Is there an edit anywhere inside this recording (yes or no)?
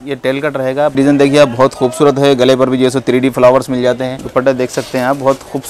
yes